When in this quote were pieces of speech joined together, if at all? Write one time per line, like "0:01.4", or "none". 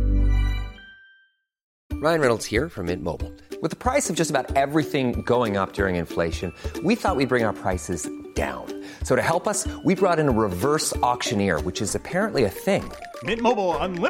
0:01.7